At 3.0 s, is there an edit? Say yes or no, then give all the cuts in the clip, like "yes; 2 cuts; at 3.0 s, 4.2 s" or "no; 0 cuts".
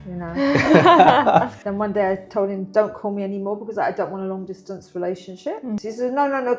no; 1 cut; at 1.6 s